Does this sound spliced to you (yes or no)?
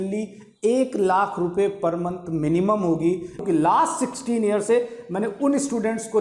yes